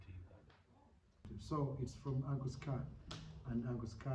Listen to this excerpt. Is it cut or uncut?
cut